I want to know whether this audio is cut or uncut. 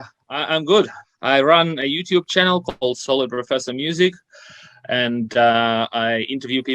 cut